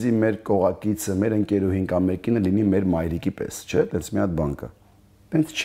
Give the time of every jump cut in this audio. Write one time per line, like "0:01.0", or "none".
none